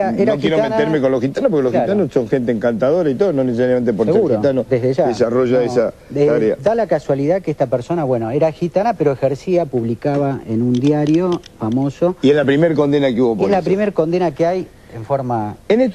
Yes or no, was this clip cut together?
yes